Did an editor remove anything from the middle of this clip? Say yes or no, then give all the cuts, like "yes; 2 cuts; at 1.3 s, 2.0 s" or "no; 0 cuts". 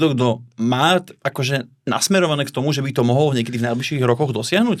no; 0 cuts